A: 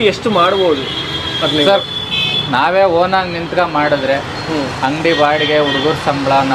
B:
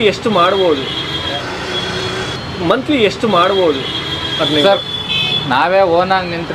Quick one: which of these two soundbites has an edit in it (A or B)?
A